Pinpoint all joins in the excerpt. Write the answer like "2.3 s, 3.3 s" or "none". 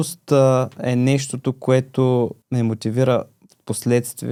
none

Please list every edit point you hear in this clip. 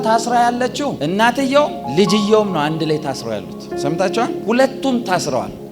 none

